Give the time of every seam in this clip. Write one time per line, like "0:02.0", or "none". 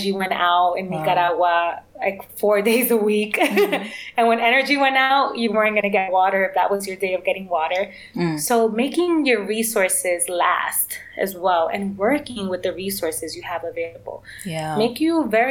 none